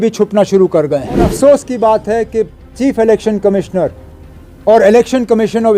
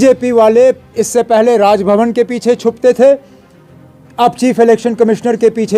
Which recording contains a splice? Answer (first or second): first